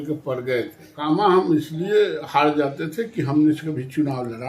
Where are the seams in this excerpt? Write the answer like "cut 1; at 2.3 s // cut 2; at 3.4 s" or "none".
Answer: cut 1; at 0.9 s